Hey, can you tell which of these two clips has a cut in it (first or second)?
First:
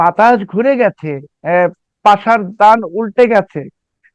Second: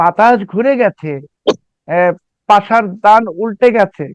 first